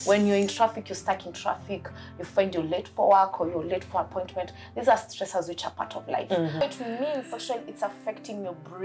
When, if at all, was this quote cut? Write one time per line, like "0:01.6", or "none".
0:06.6